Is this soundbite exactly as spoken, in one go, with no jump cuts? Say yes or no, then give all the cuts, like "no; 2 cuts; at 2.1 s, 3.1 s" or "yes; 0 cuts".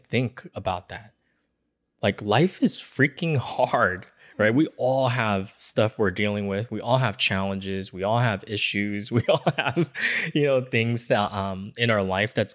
yes; 0 cuts